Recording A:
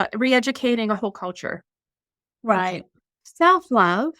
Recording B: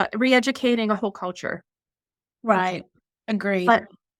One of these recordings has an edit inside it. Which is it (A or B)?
A